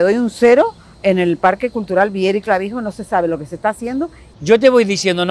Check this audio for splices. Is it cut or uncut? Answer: cut